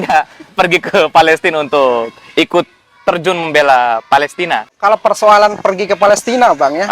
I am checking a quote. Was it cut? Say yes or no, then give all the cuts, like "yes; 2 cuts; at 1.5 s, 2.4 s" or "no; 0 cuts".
yes; 1 cut; at 4.8 s